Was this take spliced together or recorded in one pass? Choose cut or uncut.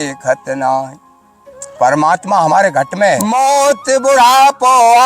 cut